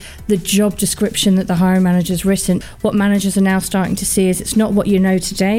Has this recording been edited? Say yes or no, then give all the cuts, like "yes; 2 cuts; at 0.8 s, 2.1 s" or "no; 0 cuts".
yes; 1 cut; at 2.6 s